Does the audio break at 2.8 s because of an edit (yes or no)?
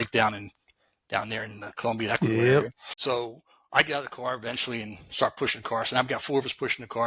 no